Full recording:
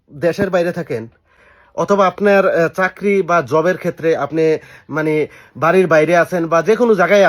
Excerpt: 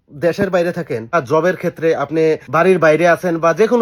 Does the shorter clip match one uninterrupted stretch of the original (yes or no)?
no